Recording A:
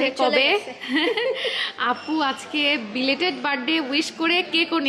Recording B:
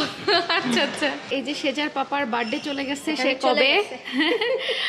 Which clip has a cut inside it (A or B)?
B